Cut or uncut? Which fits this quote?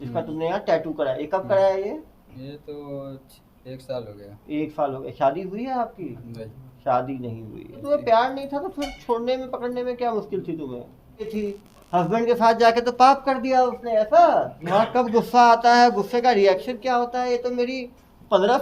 cut